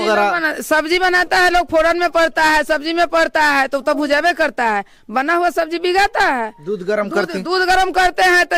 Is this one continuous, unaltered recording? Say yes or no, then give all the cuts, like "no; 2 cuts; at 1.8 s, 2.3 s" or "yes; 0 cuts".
yes; 0 cuts